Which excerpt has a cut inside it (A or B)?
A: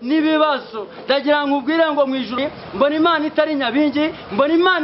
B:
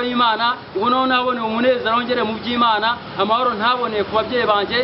A